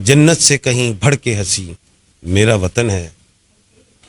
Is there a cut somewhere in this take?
no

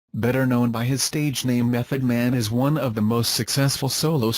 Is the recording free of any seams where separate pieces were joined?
no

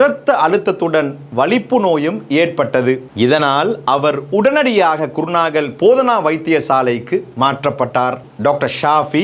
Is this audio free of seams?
no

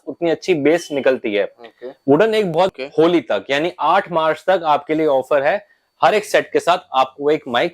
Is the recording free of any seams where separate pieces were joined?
no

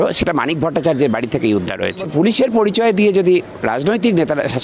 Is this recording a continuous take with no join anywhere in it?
no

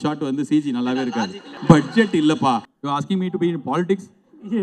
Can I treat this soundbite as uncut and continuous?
no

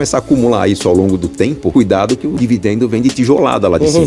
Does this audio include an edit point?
yes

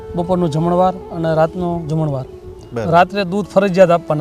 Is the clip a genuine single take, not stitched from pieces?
yes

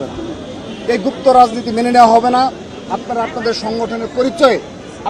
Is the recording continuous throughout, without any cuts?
yes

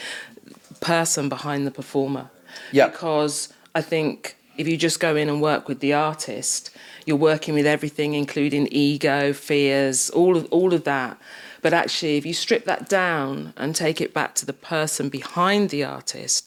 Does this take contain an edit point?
no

